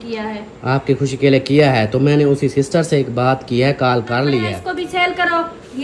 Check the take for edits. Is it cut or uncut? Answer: cut